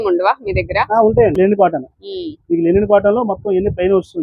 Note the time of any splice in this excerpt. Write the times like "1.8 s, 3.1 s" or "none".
1.3 s